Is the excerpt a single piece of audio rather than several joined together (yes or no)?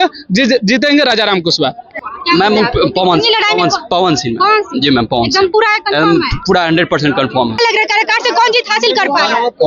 no